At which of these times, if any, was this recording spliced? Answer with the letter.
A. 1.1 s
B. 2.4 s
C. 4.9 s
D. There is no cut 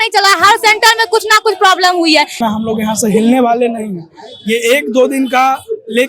B